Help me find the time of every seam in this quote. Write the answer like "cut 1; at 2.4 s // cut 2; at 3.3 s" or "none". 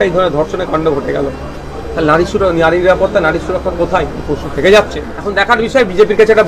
cut 1; at 5.3 s